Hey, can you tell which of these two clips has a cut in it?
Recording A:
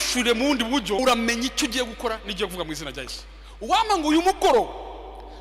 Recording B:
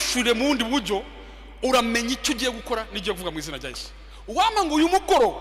A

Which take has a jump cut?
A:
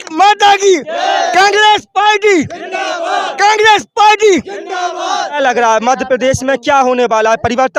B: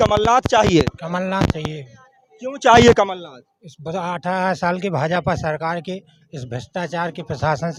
A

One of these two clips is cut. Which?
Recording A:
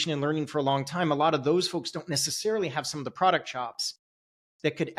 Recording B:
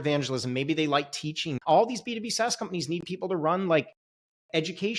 B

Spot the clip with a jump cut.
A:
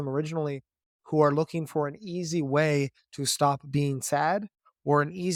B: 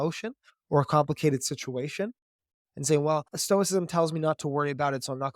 B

